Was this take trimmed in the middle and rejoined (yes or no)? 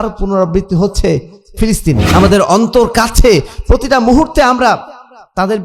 yes